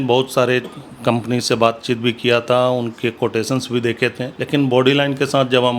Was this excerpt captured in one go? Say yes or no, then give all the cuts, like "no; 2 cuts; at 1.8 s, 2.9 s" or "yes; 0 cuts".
no; 1 cut; at 4.3 s